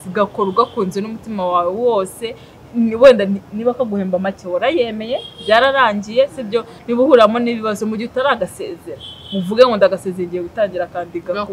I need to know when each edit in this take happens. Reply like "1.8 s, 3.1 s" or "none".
none